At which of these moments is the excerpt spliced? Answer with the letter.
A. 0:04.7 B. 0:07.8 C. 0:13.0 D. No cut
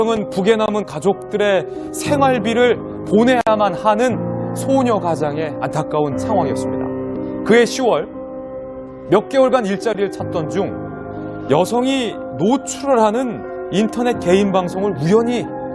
C